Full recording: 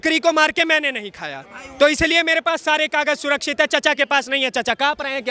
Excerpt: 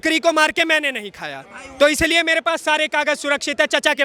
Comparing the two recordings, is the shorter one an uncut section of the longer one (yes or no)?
yes